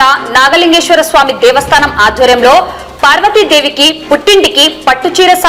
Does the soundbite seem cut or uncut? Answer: uncut